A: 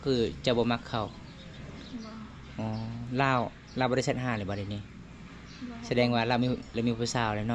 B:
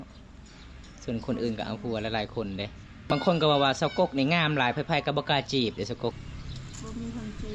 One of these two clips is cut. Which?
B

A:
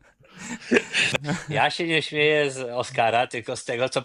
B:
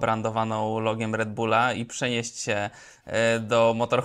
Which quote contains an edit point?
A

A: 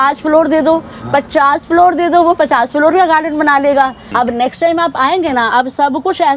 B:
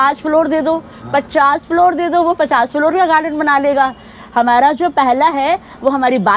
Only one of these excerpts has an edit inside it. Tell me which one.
A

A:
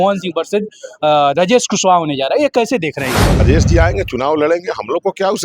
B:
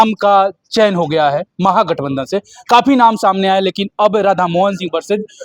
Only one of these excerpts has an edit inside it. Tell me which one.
A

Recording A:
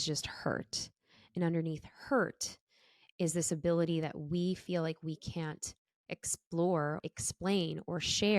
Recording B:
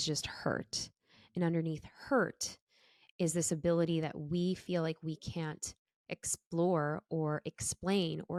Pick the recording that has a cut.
A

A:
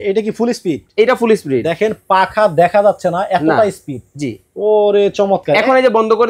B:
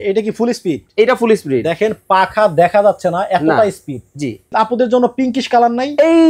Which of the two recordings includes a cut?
B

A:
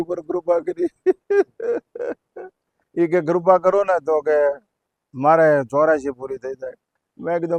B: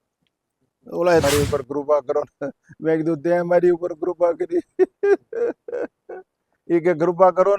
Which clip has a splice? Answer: B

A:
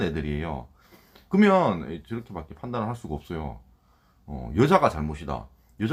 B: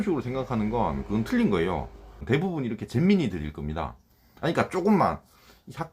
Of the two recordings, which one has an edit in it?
B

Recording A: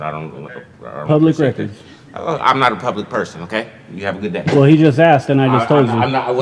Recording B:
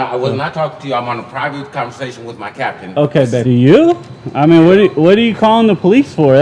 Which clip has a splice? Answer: B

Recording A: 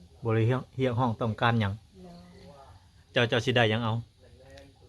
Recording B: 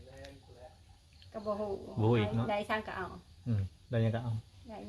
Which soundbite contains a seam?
A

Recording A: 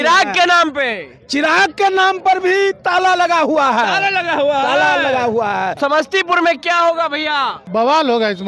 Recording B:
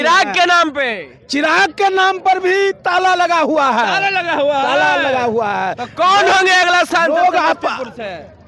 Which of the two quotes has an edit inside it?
A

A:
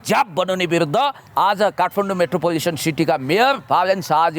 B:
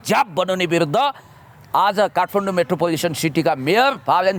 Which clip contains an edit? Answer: A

